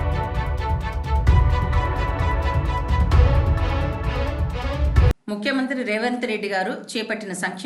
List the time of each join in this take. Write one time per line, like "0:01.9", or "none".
0:04.2